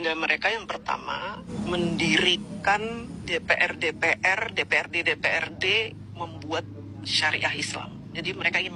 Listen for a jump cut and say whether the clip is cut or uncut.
cut